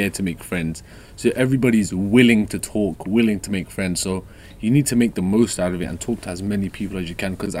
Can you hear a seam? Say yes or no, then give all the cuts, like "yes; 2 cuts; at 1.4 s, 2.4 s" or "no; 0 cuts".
no; 0 cuts